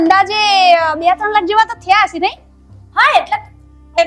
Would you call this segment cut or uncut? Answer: uncut